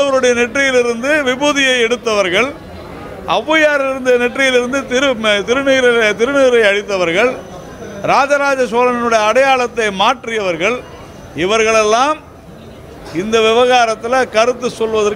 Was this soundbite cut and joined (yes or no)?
no